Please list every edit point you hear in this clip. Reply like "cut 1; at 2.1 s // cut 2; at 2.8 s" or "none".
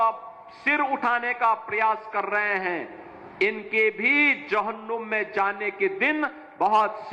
none